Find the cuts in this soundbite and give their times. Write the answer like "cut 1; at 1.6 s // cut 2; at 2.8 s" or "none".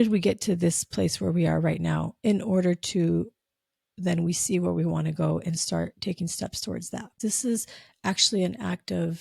cut 1; at 7.2 s